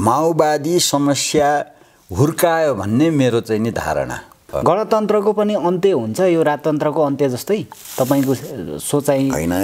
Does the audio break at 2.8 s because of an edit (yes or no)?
no